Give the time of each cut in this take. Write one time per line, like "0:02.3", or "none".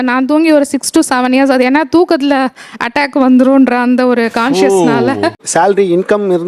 0:01.7
0:05.0